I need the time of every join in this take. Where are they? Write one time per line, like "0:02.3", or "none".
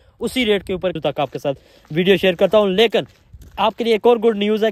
0:01.0